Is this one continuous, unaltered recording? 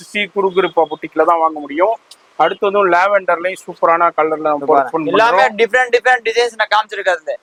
yes; 0 cuts

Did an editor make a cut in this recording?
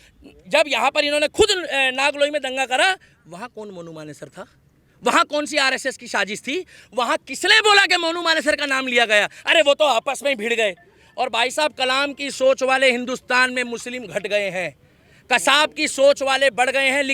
no; 0 cuts

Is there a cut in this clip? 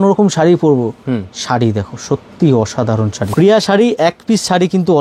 yes; 1 cut; at 3.2 s

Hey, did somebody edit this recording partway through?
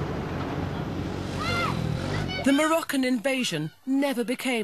yes; 1 cut; at 1.6 s

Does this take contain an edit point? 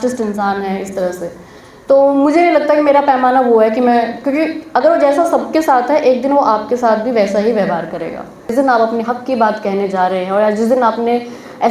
yes; 1 cut; at 8.5 s

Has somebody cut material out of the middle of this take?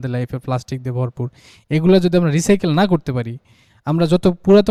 no; 0 cuts

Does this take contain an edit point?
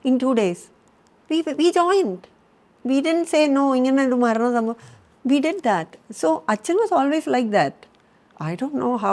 no; 0 cuts

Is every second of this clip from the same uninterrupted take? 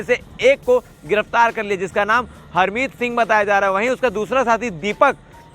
yes; 0 cuts

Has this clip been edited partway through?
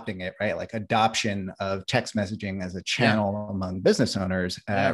no; 0 cuts

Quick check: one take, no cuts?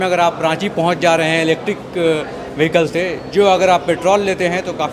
yes; 0 cuts

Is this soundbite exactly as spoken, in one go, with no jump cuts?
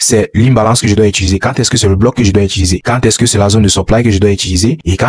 yes; 0 cuts

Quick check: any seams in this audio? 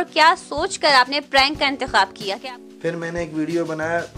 yes; 1 cut; at 2.2 s

